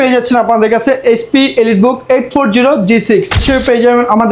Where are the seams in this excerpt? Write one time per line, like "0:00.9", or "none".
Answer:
0:03.4